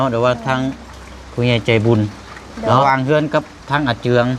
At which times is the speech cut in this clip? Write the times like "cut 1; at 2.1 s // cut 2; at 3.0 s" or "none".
cut 1; at 2.8 s